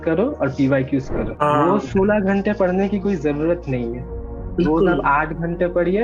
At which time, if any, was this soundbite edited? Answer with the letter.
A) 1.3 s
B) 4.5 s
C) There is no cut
A